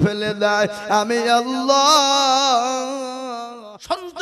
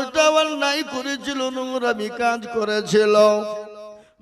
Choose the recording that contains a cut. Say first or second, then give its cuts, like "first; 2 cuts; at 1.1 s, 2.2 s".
first; 1 cut; at 3.3 s